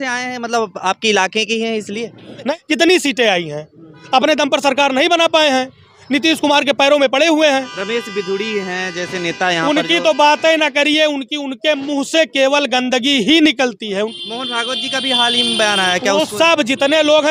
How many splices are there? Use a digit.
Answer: 3